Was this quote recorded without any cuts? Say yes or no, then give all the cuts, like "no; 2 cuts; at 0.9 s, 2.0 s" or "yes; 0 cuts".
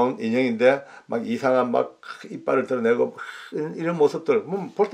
yes; 0 cuts